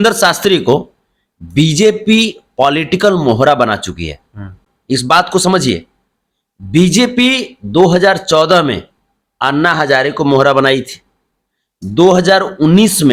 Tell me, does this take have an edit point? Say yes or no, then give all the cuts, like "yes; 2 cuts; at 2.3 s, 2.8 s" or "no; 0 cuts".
no; 0 cuts